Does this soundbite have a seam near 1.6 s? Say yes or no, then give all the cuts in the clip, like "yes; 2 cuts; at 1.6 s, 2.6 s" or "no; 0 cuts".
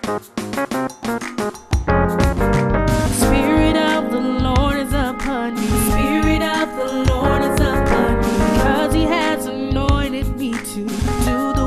no; 1 cut; at 10.3 s